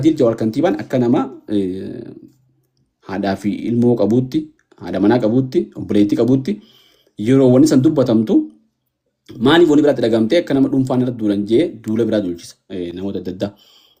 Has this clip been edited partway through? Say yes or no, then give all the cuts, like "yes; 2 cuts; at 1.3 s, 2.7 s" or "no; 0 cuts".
no; 0 cuts